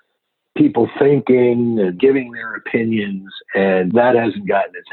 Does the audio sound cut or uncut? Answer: cut